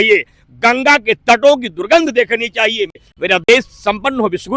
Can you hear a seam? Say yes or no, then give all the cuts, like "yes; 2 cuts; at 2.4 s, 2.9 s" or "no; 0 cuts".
yes; 1 cut; at 3.0 s